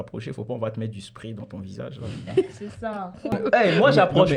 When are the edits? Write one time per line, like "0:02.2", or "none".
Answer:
0:03.3